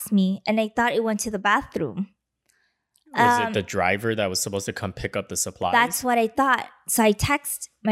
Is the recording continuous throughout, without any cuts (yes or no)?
yes